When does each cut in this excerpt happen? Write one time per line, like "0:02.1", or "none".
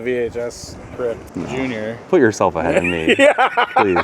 0:01.2